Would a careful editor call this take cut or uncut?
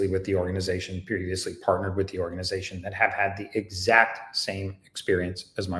uncut